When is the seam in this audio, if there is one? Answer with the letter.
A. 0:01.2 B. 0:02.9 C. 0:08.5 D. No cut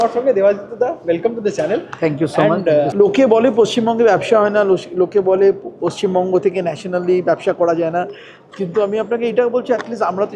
B